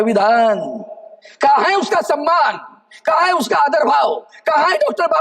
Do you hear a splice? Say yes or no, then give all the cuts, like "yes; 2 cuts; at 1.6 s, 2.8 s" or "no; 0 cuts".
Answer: no; 0 cuts